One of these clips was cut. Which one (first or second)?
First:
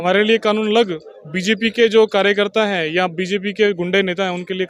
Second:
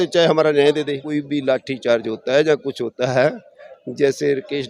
second